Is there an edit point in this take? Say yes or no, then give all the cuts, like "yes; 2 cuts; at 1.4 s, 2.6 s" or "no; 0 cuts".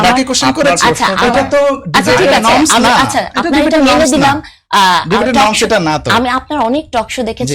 no; 0 cuts